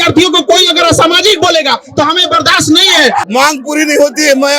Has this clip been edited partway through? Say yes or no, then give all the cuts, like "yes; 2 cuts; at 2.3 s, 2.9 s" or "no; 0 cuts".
yes; 1 cut; at 3.3 s